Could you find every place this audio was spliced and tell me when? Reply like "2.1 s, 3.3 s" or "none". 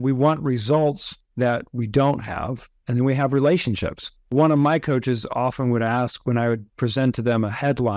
4.2 s